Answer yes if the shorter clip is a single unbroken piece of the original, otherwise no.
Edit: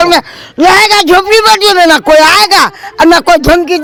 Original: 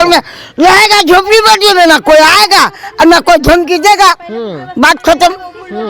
yes